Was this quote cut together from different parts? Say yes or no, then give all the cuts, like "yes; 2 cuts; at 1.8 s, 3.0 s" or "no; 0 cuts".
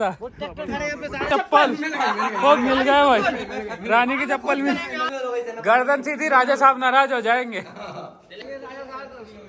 yes; 3 cuts; at 1.3 s, 5.0 s, 8.4 s